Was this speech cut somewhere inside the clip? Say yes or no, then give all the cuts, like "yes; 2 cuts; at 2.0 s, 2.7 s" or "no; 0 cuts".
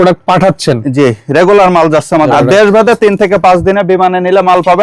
yes; 1 cut; at 2.3 s